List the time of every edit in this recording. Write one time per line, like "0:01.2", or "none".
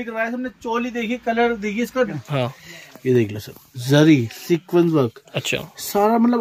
0:02.2